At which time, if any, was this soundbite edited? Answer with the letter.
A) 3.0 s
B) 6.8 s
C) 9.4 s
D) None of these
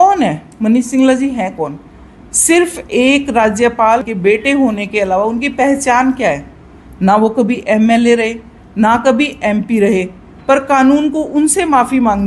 D